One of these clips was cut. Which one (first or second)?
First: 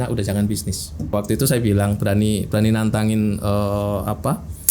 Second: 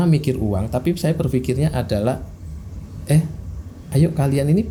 first